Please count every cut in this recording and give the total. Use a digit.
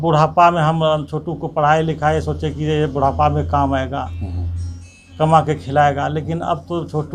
0